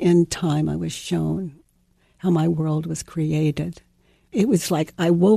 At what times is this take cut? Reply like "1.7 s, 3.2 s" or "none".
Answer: 1.7 s, 4.3 s